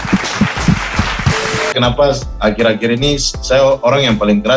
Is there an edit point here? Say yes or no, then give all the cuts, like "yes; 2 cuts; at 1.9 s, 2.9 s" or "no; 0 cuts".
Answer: yes; 1 cut; at 1.7 s